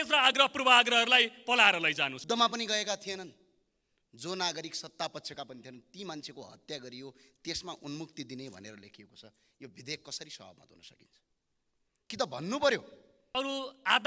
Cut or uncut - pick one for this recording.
cut